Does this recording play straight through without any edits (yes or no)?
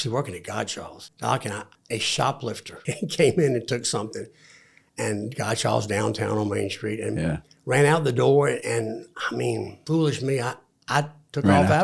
no